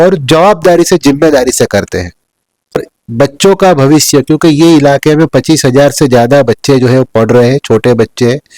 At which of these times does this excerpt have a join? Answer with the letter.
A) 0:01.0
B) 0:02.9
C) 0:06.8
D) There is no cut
B